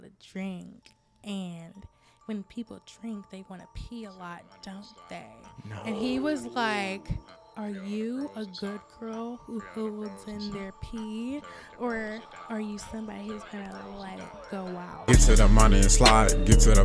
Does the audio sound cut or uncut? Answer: cut